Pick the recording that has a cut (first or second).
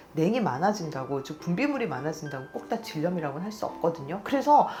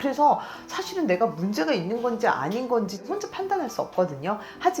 second